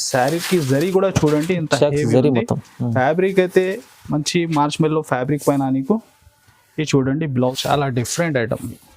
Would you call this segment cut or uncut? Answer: cut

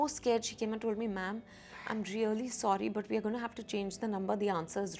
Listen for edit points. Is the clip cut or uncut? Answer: uncut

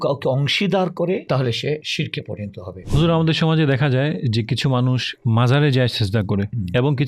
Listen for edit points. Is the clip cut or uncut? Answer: cut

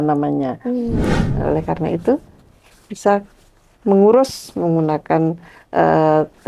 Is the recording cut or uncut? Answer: cut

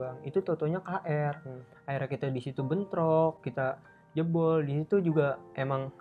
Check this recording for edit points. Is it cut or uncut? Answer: uncut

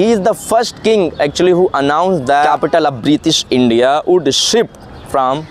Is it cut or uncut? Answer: cut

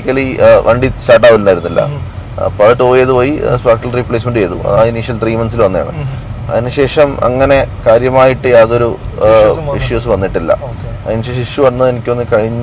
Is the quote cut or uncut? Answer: uncut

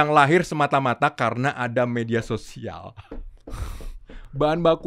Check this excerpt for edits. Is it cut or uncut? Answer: uncut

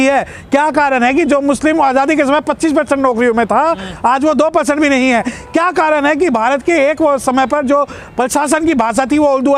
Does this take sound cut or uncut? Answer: uncut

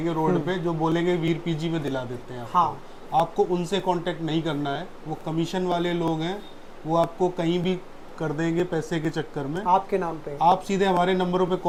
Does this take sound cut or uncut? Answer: uncut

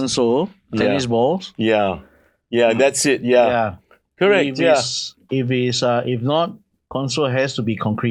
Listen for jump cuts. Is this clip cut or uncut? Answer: uncut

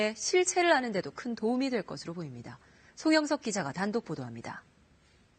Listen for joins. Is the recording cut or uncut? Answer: cut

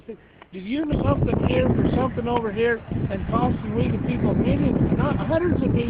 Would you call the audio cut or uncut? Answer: uncut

